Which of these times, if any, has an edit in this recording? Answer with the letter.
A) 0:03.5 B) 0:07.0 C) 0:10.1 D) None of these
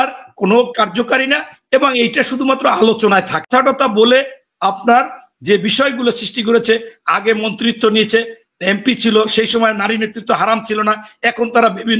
A